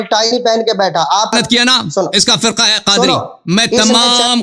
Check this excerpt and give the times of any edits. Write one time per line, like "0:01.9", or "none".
0:01.3